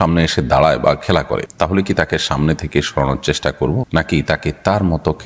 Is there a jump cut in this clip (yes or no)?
no